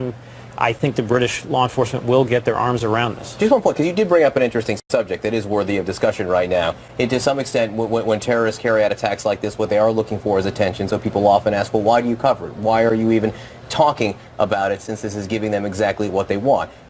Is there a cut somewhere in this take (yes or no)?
yes